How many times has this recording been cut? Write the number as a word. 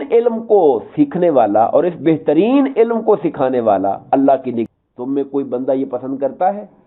one